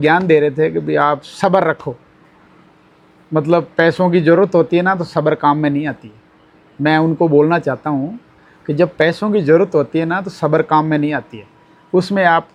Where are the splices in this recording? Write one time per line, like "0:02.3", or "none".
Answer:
none

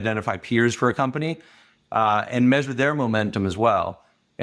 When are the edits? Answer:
none

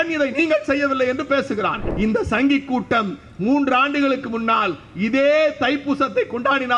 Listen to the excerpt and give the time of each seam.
0:01.9

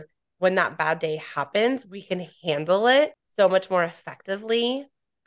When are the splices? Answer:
0:03.2

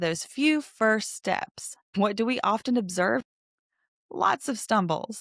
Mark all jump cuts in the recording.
0:01.9
0:03.2

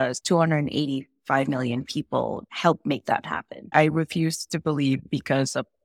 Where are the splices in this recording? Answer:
0:03.7

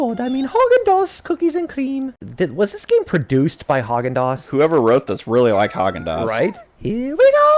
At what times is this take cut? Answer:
0:02.1

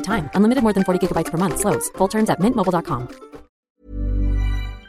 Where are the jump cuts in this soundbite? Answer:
0:03.6

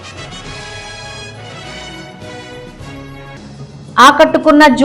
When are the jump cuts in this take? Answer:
0:03.1

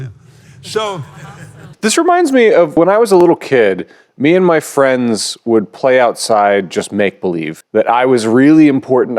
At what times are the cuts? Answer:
0:01.7
0:02.8
0:07.6

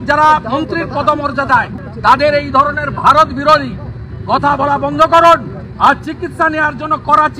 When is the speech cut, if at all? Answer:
0:01.8
0:05.6

